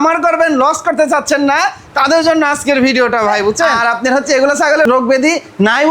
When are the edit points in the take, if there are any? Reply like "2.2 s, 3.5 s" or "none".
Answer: 3.8 s, 4.8 s